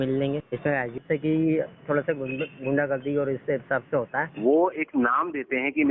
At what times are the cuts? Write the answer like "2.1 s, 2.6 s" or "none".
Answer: 0.9 s, 4.3 s